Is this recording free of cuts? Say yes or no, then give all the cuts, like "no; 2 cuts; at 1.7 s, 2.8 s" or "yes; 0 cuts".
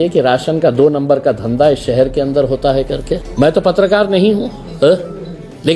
no; 1 cut; at 3.3 s